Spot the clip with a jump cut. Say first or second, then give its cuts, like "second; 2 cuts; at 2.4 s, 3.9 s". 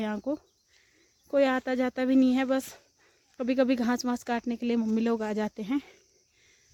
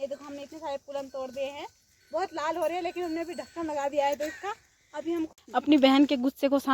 second; 1 cut; at 5.3 s